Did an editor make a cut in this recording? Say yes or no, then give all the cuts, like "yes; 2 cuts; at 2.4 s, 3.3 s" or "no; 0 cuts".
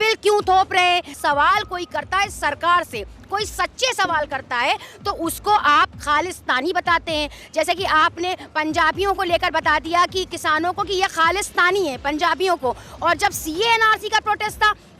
yes; 1 cut; at 1.1 s